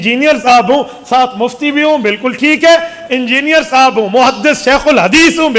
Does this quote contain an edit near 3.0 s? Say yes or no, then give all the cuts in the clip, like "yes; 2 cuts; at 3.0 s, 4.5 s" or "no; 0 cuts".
no; 0 cuts